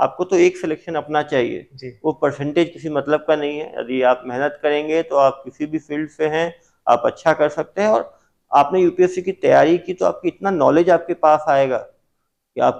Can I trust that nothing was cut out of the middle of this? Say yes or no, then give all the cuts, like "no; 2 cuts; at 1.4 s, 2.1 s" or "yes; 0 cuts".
yes; 0 cuts